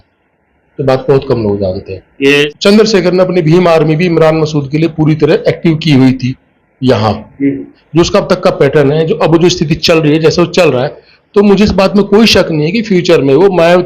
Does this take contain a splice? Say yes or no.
yes